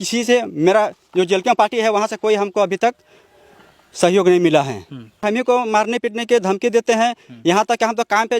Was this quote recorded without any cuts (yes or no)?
no